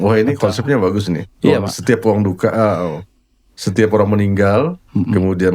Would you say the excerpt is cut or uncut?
uncut